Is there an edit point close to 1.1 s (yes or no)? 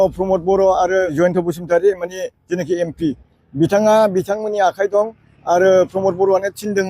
yes